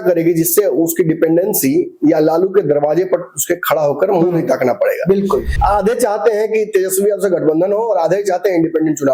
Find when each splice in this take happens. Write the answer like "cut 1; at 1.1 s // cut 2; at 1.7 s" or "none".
cut 1; at 5.5 s